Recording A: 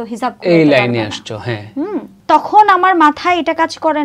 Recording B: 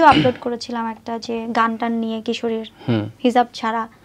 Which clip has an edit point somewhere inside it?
A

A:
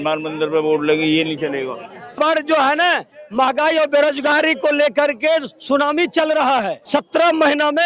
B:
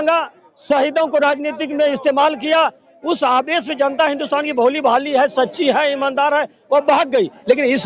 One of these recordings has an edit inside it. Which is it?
A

